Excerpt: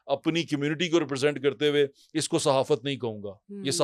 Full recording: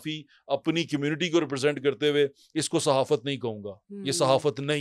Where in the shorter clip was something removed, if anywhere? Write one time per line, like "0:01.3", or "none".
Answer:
none